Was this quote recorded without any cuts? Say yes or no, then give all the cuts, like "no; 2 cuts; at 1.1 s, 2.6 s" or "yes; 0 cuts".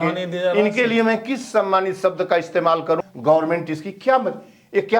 no; 1 cut; at 3.0 s